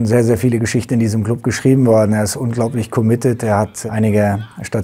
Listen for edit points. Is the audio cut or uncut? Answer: cut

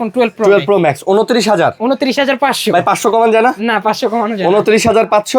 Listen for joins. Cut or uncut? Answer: uncut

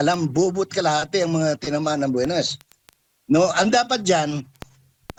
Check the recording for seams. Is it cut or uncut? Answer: uncut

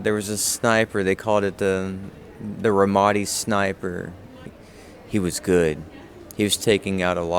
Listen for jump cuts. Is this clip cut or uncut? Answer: cut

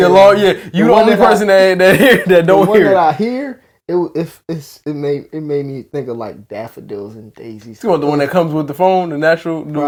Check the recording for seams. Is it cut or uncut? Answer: uncut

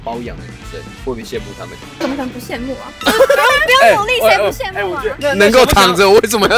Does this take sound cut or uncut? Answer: uncut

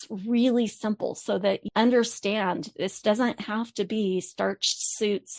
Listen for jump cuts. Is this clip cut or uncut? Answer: cut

